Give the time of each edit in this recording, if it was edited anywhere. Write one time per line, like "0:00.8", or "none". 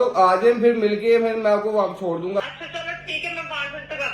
0:02.4